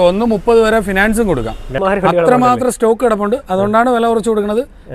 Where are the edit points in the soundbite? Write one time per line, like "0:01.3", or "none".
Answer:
0:01.7